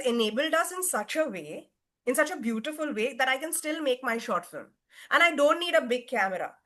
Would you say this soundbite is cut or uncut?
uncut